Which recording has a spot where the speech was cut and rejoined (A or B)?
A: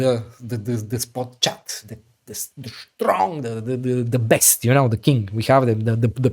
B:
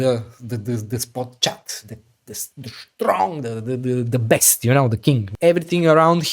B